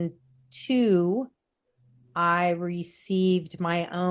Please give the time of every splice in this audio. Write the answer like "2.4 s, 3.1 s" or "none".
none